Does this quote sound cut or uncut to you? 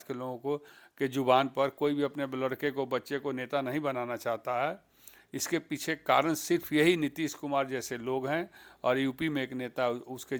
uncut